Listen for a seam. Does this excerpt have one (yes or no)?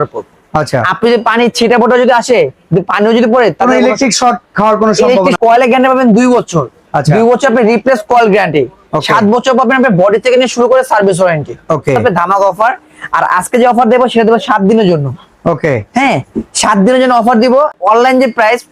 yes